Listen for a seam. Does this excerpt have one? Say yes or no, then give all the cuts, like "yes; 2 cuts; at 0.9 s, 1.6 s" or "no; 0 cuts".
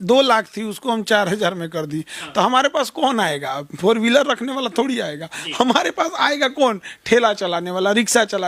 no; 0 cuts